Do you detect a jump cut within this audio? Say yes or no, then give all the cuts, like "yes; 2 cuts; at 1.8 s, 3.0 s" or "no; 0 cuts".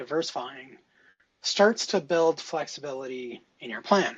no; 0 cuts